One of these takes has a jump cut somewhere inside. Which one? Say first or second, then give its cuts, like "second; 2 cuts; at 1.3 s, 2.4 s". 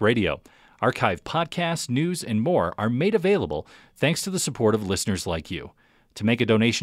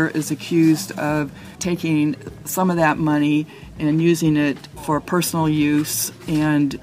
second; 1 cut; at 1.5 s